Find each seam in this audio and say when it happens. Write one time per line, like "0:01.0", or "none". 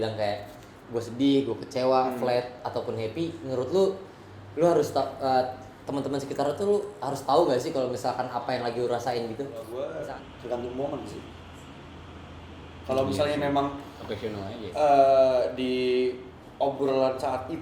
0:09.6